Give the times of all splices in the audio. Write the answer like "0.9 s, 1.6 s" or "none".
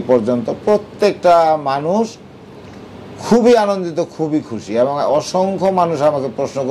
none